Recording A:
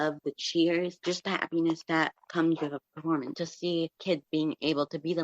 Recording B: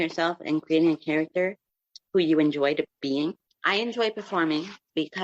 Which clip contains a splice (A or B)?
A